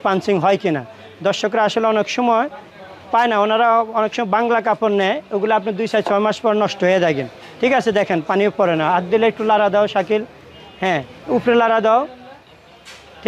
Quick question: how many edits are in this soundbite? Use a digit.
0